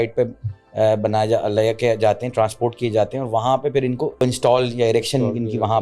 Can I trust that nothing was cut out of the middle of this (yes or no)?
no